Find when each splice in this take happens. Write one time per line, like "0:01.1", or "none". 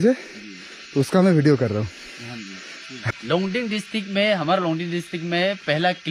0:03.2